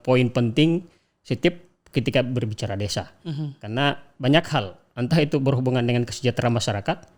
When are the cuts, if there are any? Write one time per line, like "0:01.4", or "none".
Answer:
none